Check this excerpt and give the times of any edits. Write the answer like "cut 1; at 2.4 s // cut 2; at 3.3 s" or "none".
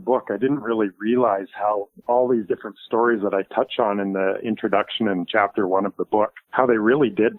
cut 1; at 1.9 s // cut 2; at 6.4 s